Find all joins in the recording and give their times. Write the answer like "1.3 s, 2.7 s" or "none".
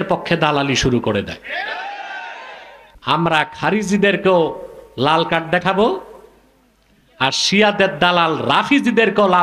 3.1 s

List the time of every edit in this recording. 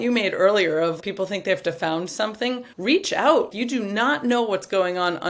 1.0 s, 2.7 s, 3.5 s

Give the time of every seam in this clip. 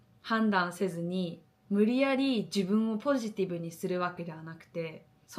none

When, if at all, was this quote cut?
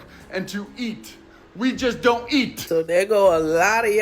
none

